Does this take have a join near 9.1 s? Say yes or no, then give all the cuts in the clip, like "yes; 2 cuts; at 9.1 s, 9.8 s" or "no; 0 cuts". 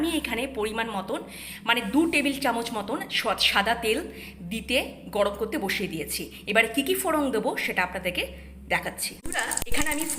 yes; 1 cut; at 9.1 s